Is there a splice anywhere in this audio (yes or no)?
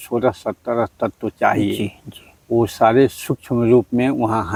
no